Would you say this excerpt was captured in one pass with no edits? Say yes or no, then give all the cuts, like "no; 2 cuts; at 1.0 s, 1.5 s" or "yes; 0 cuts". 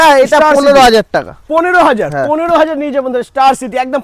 yes; 0 cuts